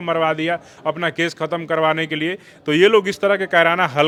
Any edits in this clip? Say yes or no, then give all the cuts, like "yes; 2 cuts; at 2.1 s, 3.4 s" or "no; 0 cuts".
no; 0 cuts